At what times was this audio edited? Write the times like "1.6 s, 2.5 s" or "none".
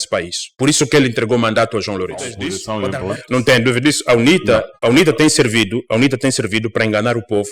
2.6 s